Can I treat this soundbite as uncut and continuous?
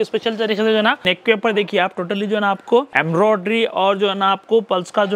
no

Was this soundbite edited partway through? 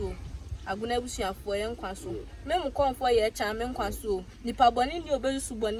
no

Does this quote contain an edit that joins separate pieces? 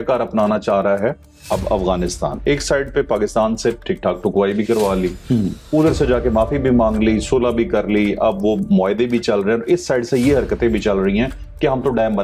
no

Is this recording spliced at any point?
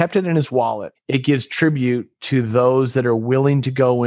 yes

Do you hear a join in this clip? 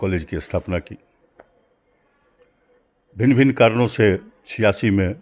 no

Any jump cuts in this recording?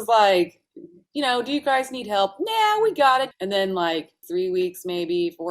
yes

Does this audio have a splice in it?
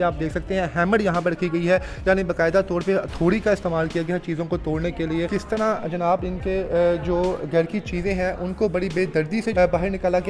yes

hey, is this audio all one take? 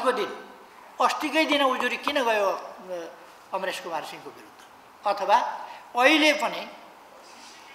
yes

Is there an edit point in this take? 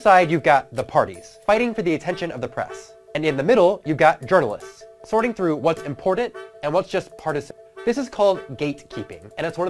yes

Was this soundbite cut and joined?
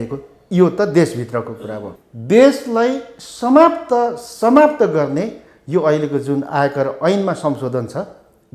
yes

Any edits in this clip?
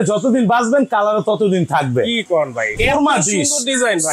yes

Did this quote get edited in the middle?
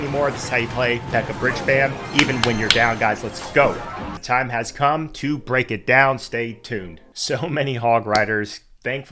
no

